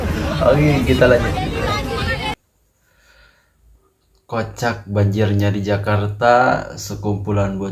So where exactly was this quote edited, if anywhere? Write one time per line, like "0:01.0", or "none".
none